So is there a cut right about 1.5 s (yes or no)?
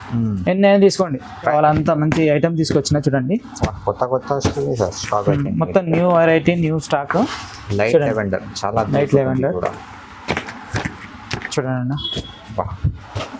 yes